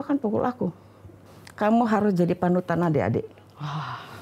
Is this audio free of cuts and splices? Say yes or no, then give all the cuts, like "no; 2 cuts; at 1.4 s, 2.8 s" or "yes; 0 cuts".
no; 1 cut; at 1.4 s